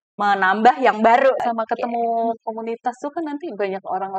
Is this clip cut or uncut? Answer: cut